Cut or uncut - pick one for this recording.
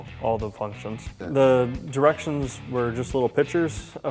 cut